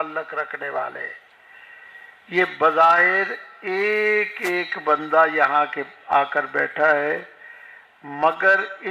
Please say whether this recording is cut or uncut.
uncut